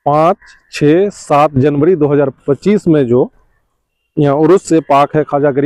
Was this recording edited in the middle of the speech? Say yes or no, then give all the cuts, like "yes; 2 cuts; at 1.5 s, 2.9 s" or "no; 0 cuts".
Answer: no; 0 cuts